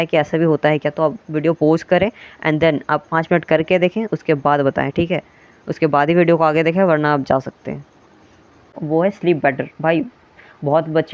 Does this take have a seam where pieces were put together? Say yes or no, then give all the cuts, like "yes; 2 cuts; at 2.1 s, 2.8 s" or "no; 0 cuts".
yes; 1 cut; at 8.8 s